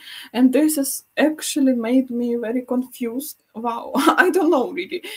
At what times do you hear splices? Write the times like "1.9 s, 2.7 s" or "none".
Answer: 3.4 s